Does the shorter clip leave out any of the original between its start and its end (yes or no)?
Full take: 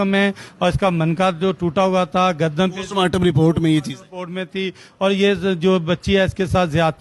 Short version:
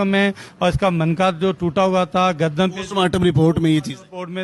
no